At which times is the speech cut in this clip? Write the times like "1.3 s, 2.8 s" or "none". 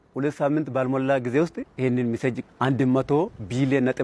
none